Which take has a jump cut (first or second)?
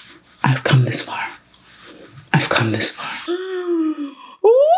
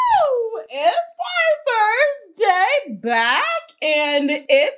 first